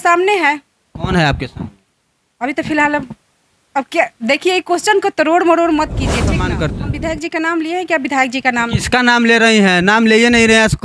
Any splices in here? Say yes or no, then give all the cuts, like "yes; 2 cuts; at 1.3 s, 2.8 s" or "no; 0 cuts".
yes; 1 cut; at 6.5 s